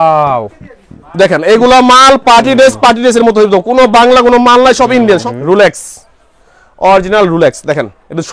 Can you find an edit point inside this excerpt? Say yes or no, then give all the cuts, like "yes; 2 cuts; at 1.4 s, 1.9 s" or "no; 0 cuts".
yes; 1 cut; at 5.2 s